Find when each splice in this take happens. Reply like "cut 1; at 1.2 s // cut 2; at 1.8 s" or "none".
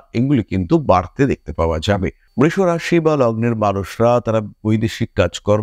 none